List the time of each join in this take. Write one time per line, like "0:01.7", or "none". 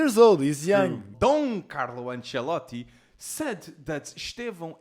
0:01.1

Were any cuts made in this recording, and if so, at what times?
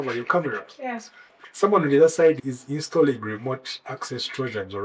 none

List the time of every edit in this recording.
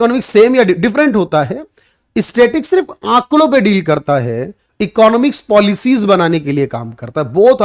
none

